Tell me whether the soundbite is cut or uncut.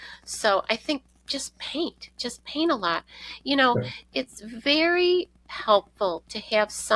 uncut